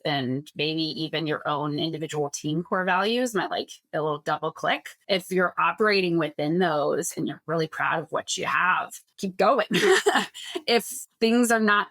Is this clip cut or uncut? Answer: cut